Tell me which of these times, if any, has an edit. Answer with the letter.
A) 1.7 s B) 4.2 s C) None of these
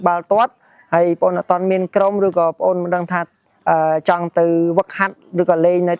C